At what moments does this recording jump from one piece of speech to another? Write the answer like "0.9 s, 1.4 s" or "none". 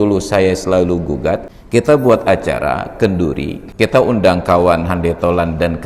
1.5 s, 3.6 s

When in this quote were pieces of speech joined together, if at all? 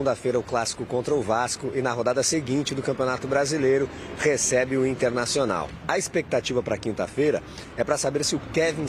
5.7 s

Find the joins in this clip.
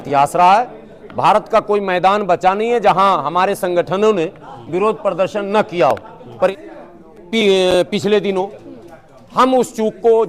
6.5 s

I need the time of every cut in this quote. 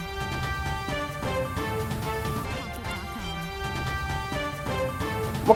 none

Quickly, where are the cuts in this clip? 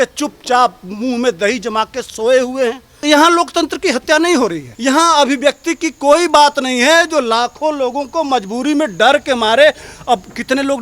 3.0 s, 4.7 s

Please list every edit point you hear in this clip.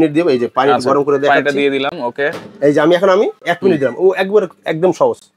none

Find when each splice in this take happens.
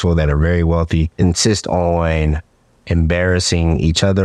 1.1 s

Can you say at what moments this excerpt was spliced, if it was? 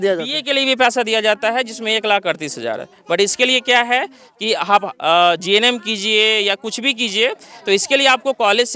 none

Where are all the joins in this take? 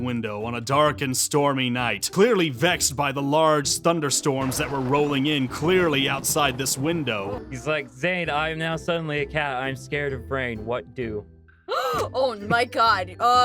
2.0 s, 7.4 s

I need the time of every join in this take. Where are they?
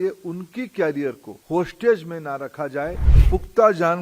0.9 s

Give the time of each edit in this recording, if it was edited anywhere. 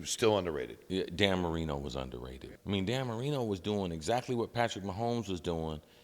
2.2 s

